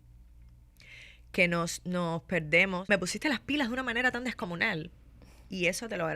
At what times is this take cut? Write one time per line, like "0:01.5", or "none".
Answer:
0:02.8